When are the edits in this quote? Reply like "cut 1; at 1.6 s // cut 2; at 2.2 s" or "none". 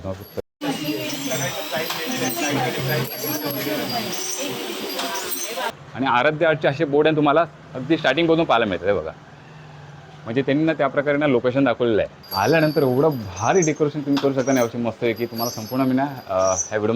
cut 1; at 5.7 s // cut 2; at 12.2 s